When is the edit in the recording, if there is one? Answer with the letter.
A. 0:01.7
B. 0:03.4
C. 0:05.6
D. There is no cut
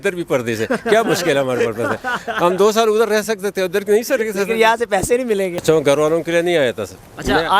C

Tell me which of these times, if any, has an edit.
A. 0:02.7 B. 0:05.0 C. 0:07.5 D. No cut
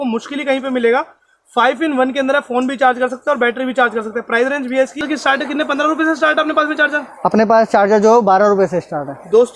B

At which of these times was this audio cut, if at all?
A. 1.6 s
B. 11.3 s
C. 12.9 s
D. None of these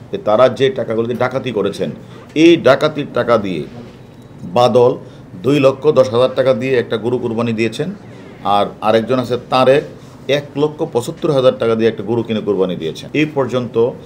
C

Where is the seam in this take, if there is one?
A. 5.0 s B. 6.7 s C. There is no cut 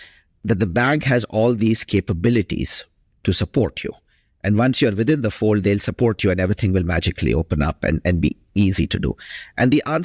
C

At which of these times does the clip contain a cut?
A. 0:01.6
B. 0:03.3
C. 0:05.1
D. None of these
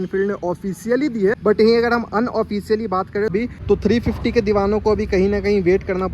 B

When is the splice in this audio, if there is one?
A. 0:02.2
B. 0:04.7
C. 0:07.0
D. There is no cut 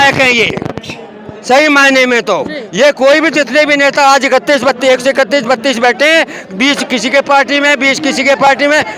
D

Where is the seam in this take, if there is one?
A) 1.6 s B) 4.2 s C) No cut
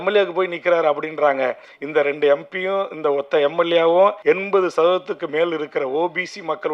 B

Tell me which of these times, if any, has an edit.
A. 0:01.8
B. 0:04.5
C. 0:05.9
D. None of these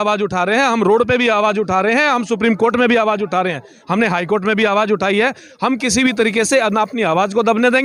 D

